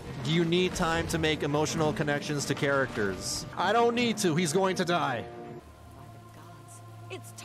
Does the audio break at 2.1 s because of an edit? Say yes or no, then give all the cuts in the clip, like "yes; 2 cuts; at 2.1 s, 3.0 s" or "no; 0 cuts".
no; 2 cuts; at 3.4 s, 5.6 s